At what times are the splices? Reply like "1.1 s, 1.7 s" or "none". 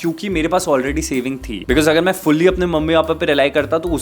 1.5 s